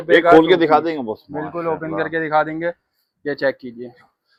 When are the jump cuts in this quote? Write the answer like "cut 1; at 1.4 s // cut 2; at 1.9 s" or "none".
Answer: none